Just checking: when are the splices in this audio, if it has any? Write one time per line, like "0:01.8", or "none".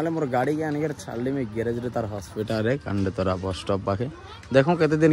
none